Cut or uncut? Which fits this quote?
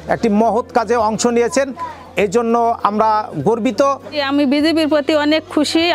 cut